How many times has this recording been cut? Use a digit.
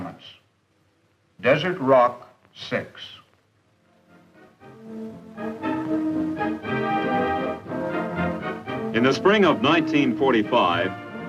1